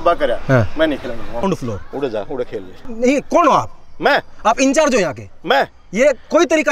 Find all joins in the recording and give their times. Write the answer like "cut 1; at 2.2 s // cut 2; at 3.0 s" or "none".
cut 1; at 1.5 s // cut 2; at 2.8 s